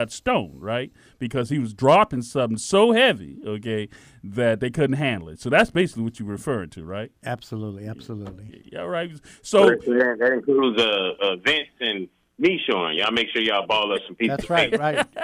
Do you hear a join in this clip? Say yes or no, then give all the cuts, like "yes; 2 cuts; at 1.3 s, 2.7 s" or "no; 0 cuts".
no; 0 cuts